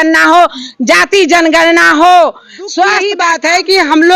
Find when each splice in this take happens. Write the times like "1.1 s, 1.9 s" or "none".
3.1 s